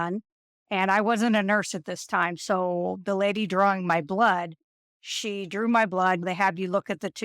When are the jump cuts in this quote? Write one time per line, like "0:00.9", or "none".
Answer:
0:06.2